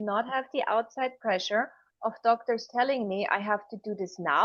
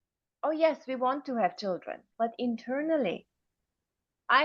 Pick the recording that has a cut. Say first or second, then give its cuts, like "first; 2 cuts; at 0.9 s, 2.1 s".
second; 1 cut; at 2.0 s